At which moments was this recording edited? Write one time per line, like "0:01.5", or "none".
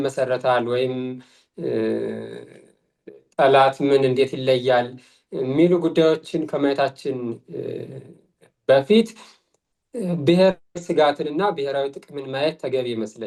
none